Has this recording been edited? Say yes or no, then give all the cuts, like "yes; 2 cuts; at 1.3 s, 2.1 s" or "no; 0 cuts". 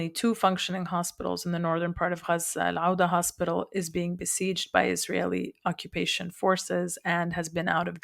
no; 0 cuts